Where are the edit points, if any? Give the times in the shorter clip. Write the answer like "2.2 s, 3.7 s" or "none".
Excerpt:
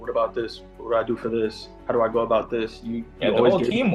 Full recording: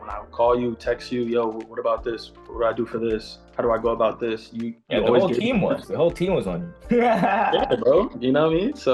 none